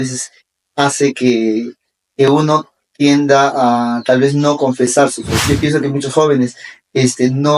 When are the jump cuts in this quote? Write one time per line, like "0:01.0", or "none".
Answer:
0:05.4